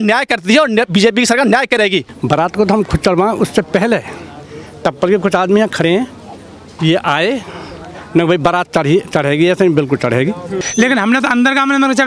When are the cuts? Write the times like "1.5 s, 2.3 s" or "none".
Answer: 2.1 s, 10.6 s